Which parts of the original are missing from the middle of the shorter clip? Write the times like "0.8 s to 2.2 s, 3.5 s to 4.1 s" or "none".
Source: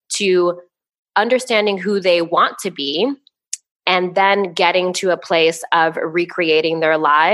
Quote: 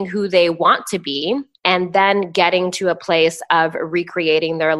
3.2 s to 3.7 s